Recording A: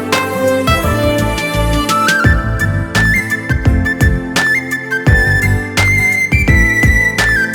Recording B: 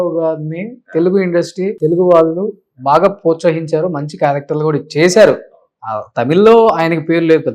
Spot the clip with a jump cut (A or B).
B